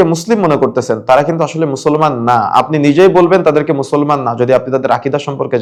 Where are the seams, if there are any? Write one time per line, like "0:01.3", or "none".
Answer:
none

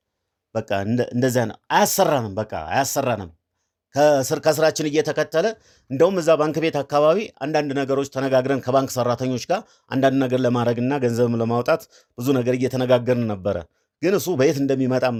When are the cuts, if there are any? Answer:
none

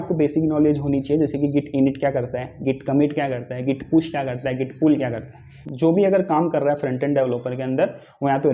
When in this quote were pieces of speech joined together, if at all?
0:05.5

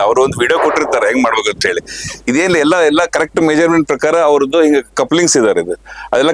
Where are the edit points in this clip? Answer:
none

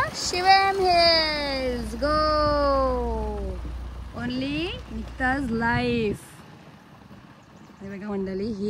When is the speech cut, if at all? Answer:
none

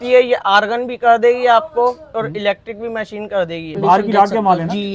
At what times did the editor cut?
0:03.8

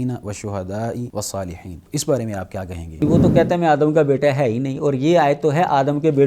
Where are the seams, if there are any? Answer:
0:01.2
0:03.0

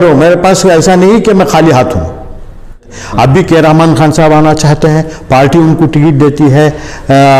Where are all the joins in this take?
0:02.9

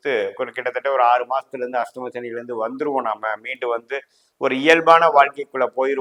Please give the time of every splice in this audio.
none

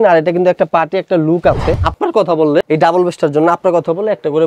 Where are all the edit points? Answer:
0:01.9

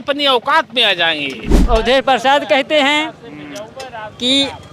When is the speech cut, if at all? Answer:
0:01.5

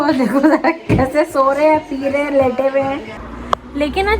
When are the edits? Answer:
0:03.3

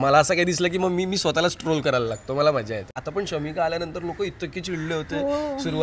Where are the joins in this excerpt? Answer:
0:03.0

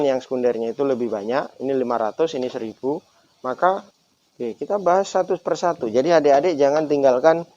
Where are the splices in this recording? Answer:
0:03.9

